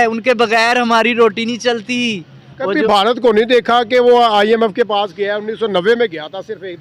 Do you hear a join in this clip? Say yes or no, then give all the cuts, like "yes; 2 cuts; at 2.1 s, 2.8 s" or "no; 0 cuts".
no; 0 cuts